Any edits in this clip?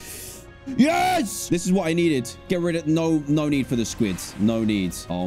no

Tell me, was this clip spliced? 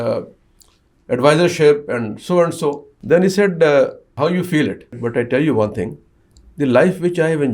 yes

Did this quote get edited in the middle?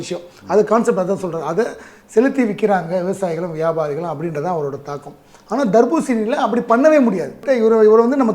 yes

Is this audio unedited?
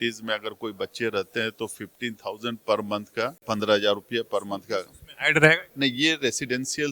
no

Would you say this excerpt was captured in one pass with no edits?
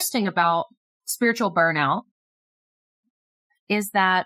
yes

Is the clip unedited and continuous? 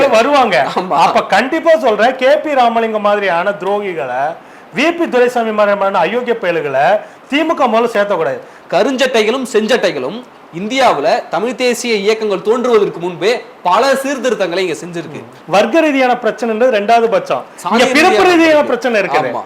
no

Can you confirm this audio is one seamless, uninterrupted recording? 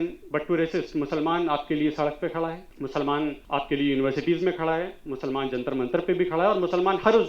no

